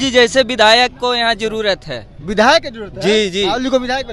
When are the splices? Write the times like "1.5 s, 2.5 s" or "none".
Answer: none